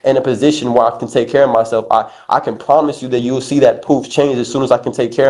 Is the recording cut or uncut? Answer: uncut